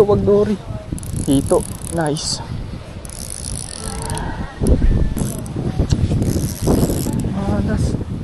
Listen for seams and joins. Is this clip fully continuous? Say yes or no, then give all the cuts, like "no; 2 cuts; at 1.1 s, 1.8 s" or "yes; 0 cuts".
no; 1 cut; at 5.2 s